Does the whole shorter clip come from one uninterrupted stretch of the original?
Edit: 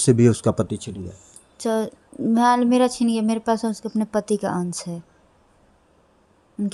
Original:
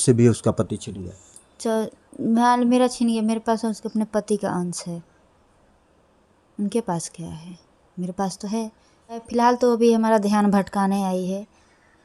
yes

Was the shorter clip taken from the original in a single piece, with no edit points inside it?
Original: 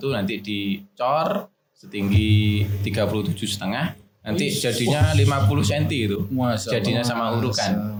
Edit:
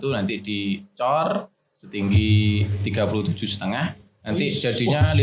yes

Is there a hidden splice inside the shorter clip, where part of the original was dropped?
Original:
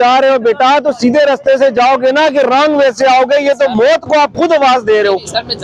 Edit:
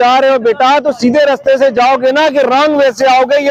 no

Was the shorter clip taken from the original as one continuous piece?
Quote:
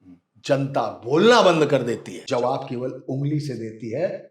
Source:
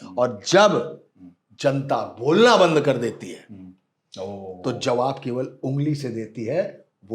no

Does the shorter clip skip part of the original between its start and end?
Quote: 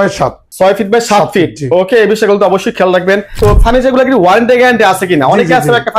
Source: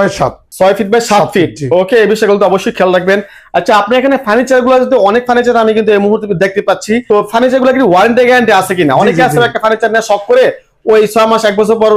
yes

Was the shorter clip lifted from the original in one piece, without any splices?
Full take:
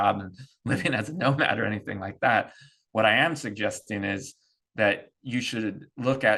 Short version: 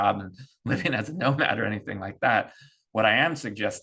yes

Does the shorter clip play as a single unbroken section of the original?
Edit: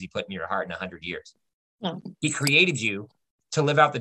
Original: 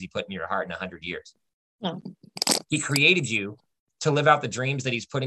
no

